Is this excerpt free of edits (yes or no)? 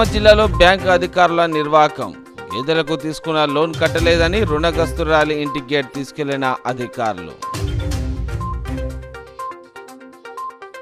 yes